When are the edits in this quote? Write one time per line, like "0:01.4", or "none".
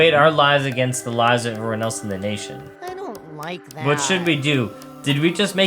0:02.6

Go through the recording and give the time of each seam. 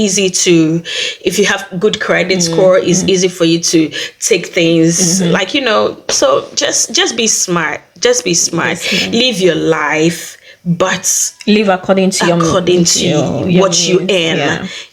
none

